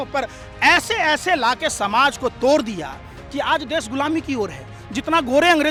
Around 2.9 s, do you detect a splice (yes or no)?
no